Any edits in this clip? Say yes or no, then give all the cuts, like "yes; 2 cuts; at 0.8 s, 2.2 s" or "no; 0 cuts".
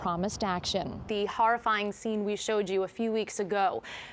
yes; 1 cut; at 1.1 s